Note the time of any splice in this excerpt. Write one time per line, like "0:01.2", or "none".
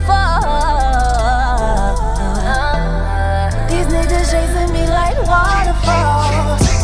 none